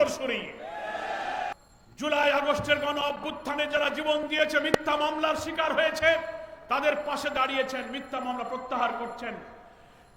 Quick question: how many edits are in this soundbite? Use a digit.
1